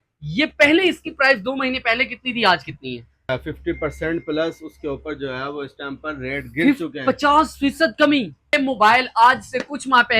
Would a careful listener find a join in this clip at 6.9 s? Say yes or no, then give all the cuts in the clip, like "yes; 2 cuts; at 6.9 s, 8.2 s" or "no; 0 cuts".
no; 2 cuts; at 3.3 s, 8.5 s